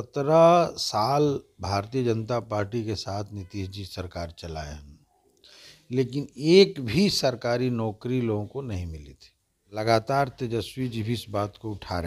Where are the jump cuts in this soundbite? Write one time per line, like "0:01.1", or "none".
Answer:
0:09.8